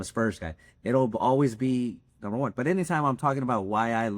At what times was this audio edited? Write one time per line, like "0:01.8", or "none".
none